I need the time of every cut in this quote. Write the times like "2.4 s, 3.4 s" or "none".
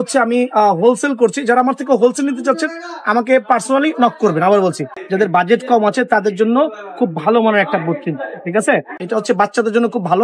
5.0 s, 8.9 s